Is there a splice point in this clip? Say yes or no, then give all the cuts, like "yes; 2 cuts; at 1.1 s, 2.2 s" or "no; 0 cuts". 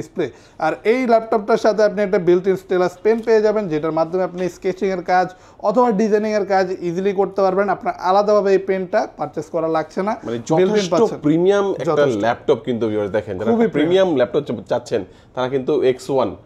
no; 0 cuts